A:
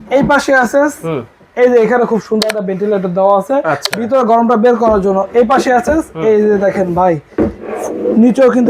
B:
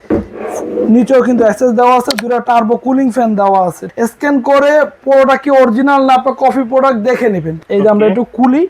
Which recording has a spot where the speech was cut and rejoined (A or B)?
B